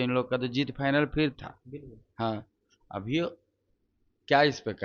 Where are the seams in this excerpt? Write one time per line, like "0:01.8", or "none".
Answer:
none